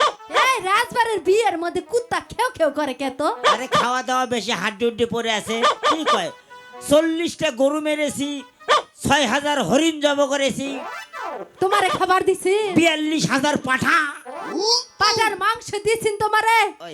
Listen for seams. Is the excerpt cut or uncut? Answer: uncut